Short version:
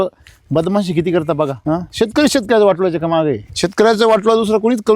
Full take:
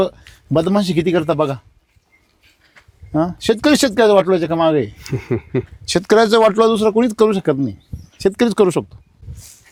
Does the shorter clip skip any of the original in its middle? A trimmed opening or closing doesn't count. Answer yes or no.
yes